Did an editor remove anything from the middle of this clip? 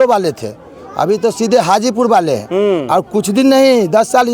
no; 0 cuts

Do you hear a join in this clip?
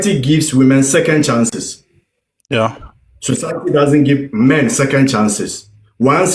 no; 0 cuts

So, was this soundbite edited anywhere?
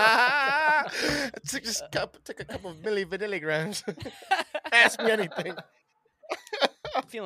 no; 0 cuts

